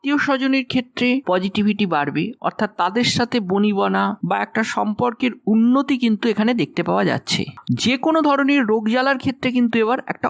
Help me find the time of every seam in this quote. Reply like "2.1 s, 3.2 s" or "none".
7.6 s